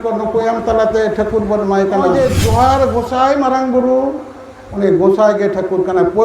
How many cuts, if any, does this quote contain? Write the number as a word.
one